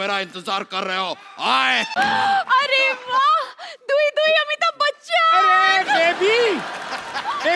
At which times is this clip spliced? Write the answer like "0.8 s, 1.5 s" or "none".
none